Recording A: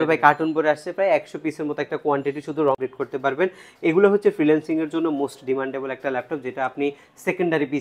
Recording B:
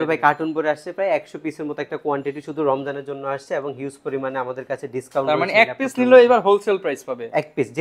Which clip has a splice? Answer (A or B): A